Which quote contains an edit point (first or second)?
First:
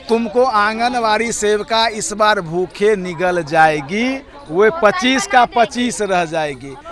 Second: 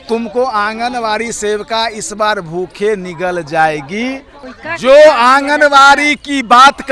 second